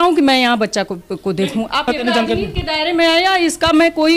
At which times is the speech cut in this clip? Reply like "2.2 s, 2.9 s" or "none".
1.9 s